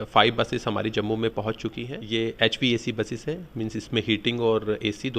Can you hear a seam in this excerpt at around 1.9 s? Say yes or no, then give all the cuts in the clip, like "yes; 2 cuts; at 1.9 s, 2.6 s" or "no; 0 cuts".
yes; 1 cut; at 1.9 s